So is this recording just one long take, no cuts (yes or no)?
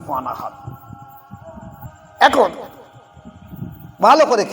no